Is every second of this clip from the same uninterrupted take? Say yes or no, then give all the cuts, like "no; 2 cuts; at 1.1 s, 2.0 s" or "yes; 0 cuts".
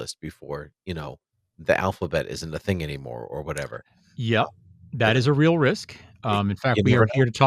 yes; 0 cuts